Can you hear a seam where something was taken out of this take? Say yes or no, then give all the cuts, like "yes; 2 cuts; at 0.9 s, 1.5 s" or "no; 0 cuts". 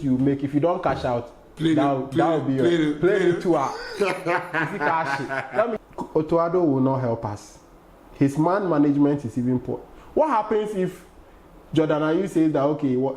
yes; 1 cut; at 5.8 s